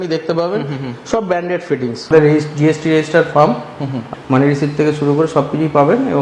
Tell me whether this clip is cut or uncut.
cut